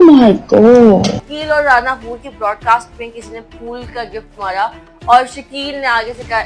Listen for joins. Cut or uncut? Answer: cut